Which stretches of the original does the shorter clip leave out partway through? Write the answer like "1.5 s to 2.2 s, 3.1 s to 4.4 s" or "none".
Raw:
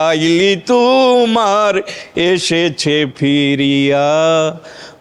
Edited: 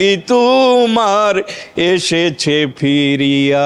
none